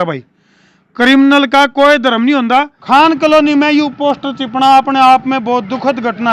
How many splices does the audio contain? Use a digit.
1